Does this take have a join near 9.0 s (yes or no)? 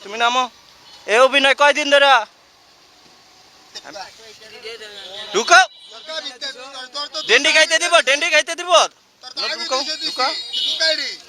no